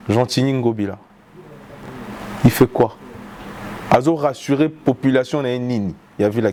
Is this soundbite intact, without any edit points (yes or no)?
yes